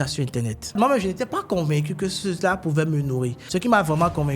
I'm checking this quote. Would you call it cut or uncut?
cut